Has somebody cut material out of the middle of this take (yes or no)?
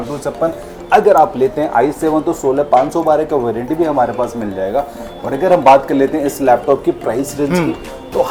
no